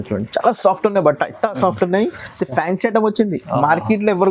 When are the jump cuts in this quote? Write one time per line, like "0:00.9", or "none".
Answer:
none